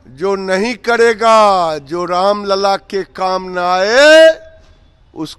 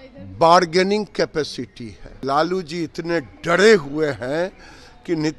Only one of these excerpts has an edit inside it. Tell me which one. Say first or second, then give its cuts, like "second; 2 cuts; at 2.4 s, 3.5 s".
second; 1 cut; at 2.2 s